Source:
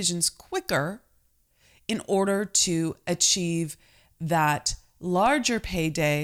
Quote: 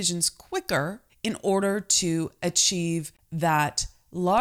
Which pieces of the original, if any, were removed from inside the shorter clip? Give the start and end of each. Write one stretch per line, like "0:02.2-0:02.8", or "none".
0:01.1-0:01.7
0:03.8-0:04.1